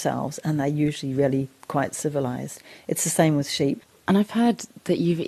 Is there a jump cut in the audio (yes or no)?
yes